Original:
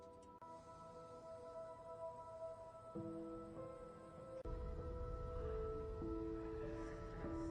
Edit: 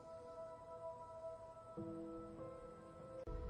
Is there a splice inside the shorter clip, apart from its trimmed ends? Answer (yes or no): no